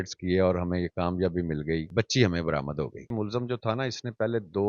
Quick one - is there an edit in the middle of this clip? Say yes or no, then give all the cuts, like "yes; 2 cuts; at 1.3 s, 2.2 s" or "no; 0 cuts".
yes; 2 cuts; at 1.9 s, 3.1 s